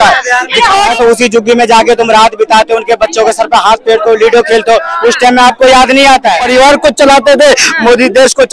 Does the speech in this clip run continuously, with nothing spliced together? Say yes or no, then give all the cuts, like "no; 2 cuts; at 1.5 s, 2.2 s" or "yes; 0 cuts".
no; 2 cuts; at 0.9 s, 6.4 s